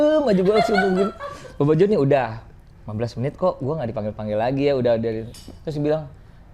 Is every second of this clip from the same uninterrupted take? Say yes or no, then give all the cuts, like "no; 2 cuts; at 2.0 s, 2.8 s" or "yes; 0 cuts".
yes; 0 cuts